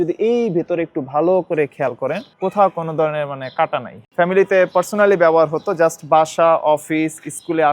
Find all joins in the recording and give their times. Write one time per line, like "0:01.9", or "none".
0:02.3
0:04.0